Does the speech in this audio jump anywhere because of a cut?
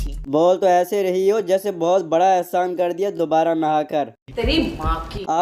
no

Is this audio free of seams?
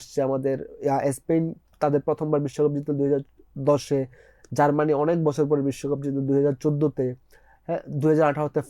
yes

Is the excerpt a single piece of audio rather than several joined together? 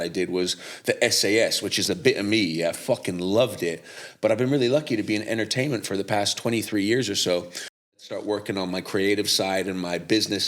no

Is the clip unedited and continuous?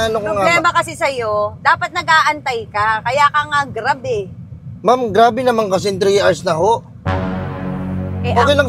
yes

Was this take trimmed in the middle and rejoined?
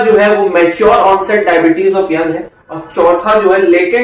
no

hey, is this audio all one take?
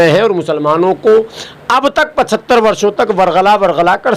yes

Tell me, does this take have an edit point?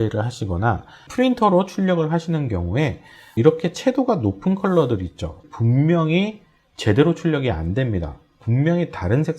yes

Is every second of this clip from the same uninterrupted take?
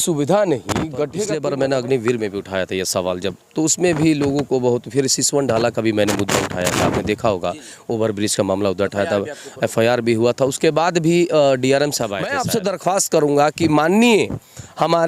no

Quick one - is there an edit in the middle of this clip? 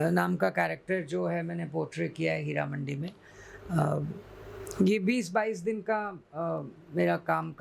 no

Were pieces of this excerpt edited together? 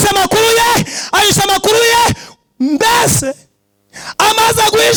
no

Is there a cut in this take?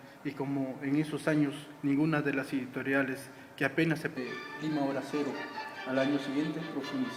no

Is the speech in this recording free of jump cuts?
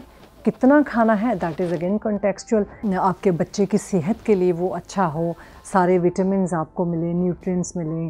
no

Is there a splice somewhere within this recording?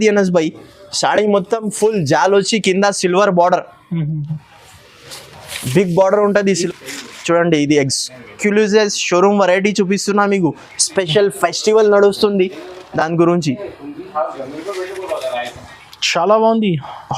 yes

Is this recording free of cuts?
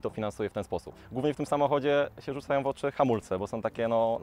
no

